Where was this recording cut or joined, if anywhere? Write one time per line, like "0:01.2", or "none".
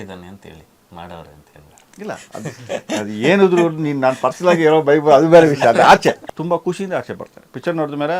0:06.2